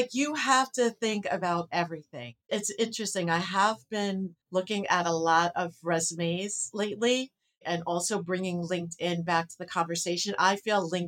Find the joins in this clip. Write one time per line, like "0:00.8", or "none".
0:02.4
0:04.4